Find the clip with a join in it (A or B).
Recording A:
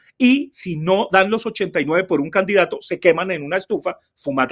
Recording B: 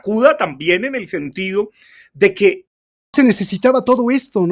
B